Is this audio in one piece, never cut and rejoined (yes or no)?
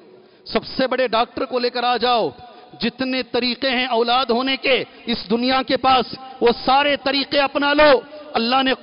yes